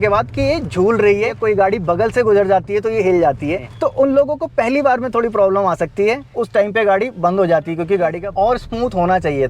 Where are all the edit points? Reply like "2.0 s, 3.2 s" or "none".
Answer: 1.4 s, 3.7 s, 6.3 s, 8.2 s